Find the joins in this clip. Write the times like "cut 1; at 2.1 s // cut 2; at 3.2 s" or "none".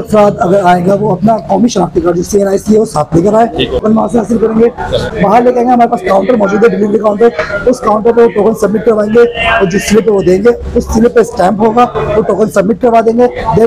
cut 1; at 3.8 s // cut 2; at 5.1 s